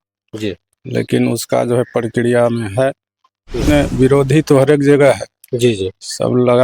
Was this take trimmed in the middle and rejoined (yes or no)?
yes